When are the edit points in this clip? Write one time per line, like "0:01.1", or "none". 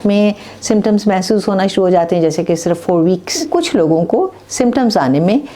0:03.4